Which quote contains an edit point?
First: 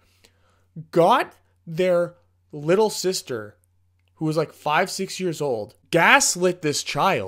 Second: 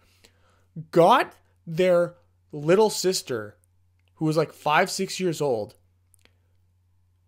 first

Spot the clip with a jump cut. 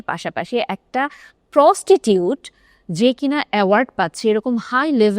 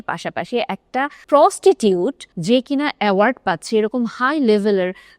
second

